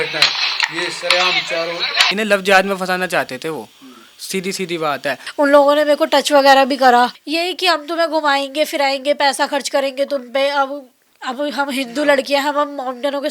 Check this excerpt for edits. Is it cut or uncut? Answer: cut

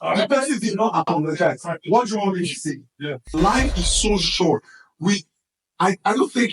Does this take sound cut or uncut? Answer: cut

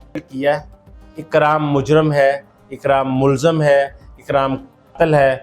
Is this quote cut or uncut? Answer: uncut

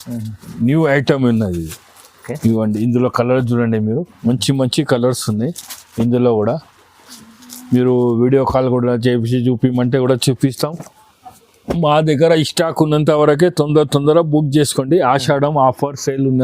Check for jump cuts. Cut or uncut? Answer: cut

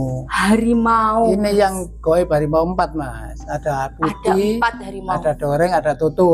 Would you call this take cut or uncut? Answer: uncut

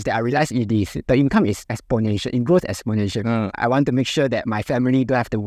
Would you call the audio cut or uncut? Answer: cut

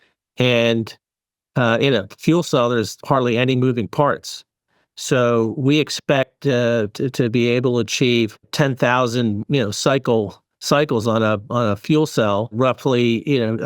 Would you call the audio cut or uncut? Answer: cut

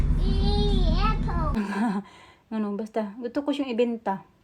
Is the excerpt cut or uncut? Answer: cut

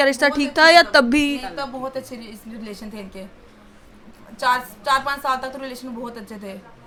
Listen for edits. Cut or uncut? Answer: uncut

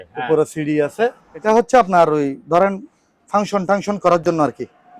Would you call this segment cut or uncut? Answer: cut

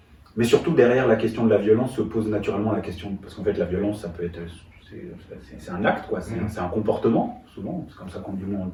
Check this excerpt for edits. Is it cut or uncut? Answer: uncut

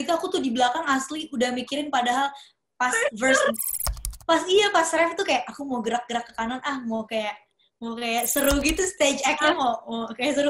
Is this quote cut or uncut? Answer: uncut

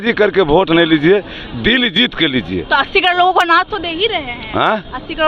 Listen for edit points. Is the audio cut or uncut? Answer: uncut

